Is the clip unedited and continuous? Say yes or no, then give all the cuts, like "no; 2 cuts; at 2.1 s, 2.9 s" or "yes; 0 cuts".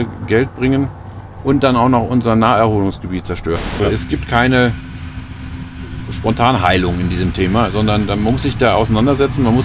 no; 1 cut; at 3.8 s